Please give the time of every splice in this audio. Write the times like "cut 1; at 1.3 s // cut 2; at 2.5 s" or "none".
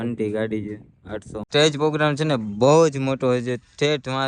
cut 1; at 1.4 s